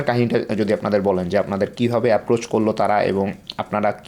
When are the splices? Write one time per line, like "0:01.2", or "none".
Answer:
none